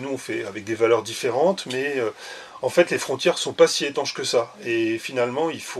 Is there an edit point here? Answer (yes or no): no